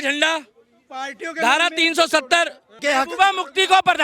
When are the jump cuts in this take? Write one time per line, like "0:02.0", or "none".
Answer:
0:02.8

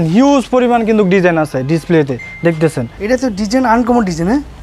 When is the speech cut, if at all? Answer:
0:02.9

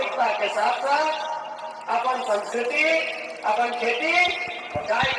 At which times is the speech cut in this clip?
none

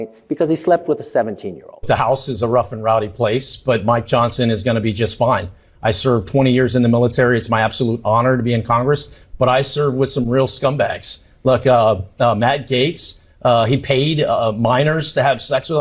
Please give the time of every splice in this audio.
0:01.8

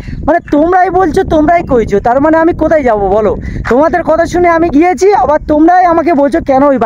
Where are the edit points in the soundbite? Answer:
none

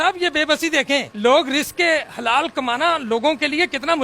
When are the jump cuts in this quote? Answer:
0:01.1

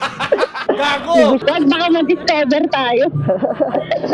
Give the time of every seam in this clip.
0:01.4

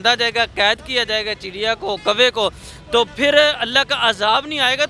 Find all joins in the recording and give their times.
none

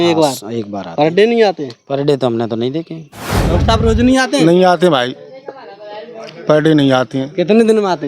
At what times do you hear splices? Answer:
0:03.2

